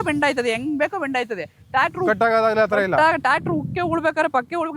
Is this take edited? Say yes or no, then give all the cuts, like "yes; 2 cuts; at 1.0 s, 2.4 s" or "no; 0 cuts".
no; 0 cuts